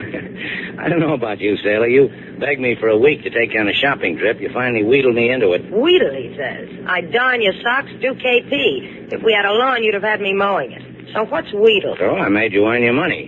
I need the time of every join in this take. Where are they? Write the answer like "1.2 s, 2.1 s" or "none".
7.9 s